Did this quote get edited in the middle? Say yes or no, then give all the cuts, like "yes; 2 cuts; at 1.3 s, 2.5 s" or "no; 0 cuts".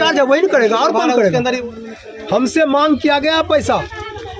yes; 1 cut; at 1.6 s